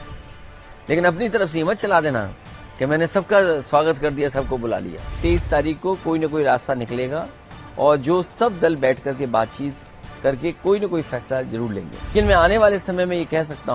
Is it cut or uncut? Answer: cut